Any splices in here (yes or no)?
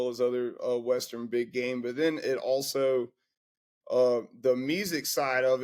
no